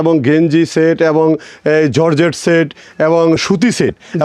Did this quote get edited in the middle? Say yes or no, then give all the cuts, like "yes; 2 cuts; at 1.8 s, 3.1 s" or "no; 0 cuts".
no; 0 cuts